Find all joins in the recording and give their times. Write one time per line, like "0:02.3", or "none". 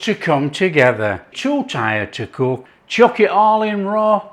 0:01.3
0:02.7